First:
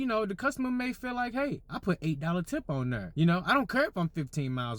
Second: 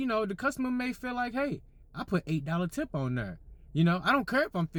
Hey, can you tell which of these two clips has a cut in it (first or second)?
first